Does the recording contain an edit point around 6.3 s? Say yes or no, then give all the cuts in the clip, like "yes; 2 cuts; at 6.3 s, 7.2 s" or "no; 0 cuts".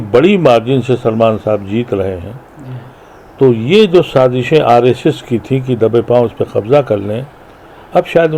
no; 0 cuts